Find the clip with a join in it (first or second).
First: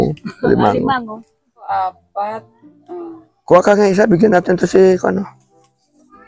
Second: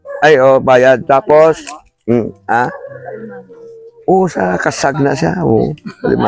first